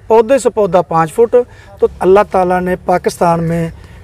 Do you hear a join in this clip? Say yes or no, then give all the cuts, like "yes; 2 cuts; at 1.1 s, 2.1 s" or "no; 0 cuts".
yes; 1 cut; at 1.9 s